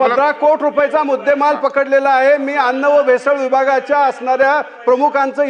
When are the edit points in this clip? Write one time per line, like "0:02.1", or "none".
none